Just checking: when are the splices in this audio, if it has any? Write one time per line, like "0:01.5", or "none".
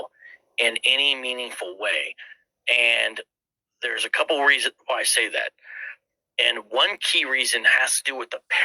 0:01.1